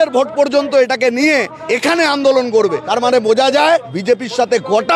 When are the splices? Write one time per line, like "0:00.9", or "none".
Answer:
0:01.6
0:02.8
0:03.9